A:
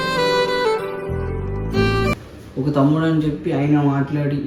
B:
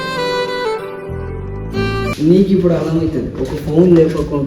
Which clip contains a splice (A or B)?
B